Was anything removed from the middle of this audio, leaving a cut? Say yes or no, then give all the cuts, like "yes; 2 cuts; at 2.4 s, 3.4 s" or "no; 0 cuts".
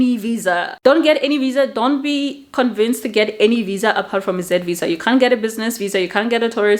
no; 0 cuts